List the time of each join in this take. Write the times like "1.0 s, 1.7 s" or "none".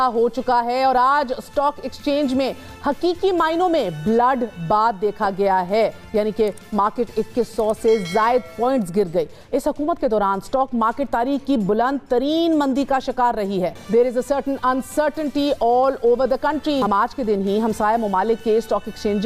none